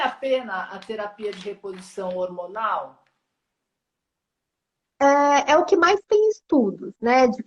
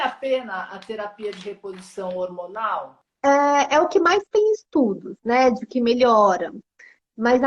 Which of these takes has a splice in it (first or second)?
second